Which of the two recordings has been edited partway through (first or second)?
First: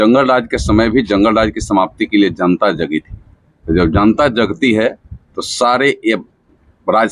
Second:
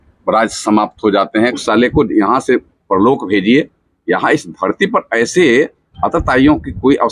second